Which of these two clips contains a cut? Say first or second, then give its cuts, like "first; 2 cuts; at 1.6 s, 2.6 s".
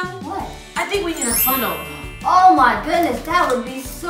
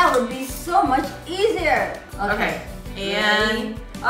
second; 1 cut; at 2.0 s